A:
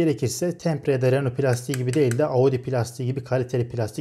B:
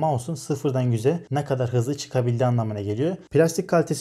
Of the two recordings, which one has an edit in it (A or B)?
B